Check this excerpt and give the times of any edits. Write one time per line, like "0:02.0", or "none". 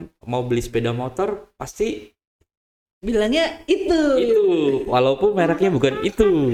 none